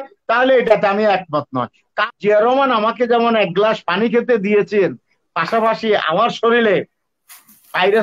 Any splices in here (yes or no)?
yes